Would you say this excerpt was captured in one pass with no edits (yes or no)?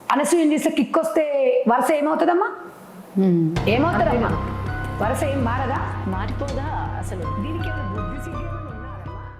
yes